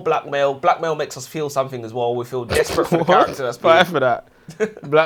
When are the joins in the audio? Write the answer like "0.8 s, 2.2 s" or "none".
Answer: none

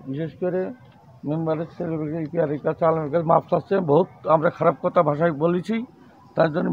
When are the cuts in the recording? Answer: none

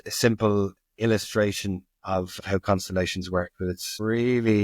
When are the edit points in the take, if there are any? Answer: none

